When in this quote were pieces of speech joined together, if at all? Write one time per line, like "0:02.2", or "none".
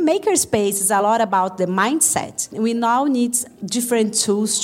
0:01.0
0:02.5